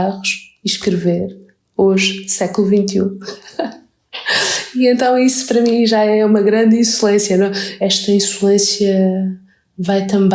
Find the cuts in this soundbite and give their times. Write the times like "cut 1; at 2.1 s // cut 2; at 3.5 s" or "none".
cut 1; at 7.6 s